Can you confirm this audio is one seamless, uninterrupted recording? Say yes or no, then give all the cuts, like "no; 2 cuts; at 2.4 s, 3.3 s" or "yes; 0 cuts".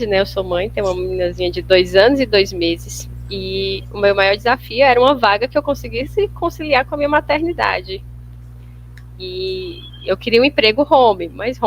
yes; 0 cuts